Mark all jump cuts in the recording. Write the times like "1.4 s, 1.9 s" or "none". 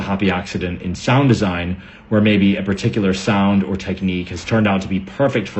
none